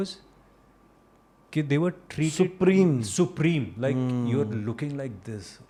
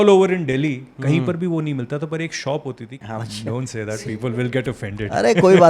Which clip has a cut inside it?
second; 1 cut; at 2.9 s

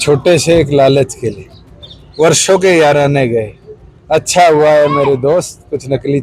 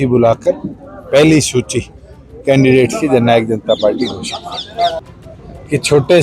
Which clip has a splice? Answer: second; 1 cut; at 4.9 s

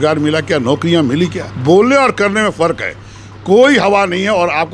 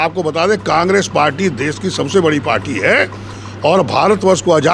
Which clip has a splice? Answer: first; 1 cut; at 1.5 s

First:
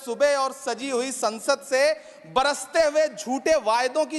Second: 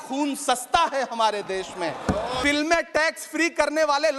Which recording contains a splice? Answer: second; 1 cut; at 2.4 s

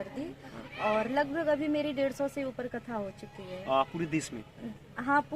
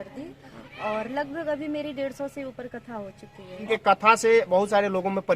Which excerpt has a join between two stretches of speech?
second; 1 cut; at 3.6 s

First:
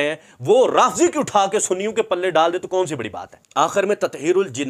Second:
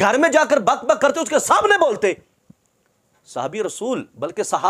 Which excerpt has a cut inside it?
first; 1 cut; at 3.4 s

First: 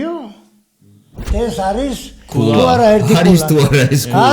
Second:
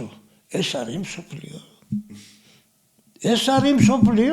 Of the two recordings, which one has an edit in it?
first; 1 cut; at 1.3 s

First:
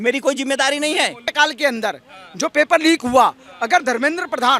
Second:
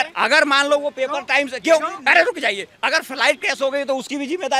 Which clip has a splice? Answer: first; 1 cut; at 1.3 s

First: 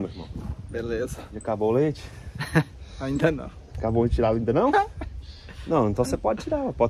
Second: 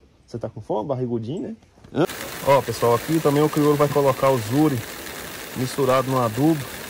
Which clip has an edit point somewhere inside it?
second; 1 cut; at 2.1 s

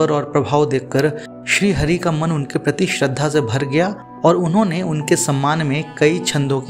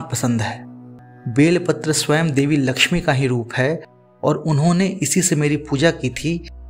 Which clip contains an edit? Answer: second; 1 cut; at 0.9 s

